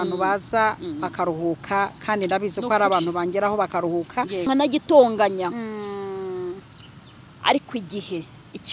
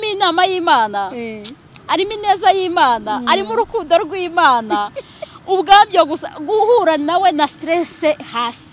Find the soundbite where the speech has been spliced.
first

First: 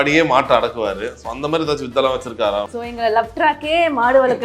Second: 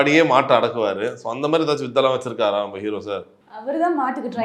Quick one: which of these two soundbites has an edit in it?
first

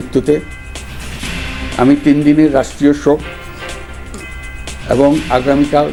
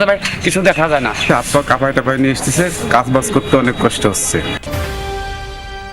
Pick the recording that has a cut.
second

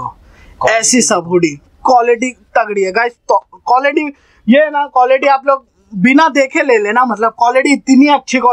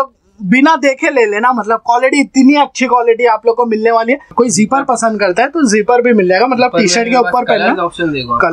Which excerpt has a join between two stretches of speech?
second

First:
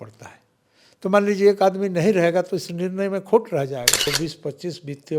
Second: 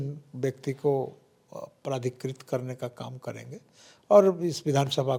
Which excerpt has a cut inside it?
first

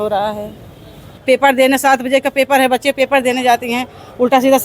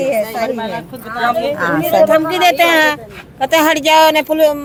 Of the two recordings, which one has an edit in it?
first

